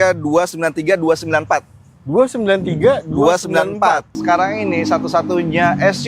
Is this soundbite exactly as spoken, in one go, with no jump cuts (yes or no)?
no